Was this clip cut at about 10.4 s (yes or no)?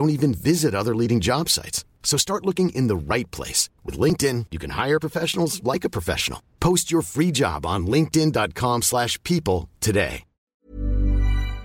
yes